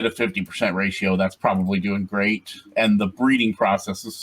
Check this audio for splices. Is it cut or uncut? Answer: uncut